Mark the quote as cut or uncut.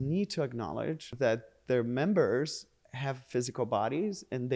cut